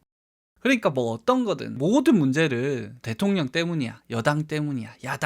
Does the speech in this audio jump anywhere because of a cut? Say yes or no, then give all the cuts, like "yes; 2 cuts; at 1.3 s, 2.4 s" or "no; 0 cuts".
yes; 1 cut; at 3.0 s